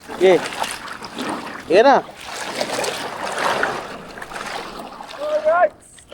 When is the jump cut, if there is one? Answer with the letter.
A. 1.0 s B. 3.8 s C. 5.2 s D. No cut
C